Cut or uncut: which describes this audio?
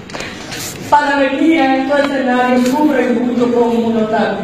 uncut